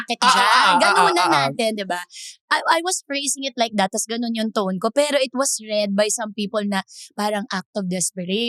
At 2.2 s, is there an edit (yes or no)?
no